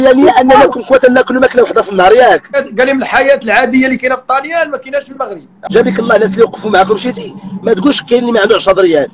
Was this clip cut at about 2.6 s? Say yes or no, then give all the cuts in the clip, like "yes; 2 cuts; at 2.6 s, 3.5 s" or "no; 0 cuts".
yes; 2 cuts; at 2.6 s, 5.5 s